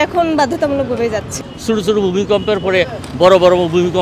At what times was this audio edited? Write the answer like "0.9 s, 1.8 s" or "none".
1.3 s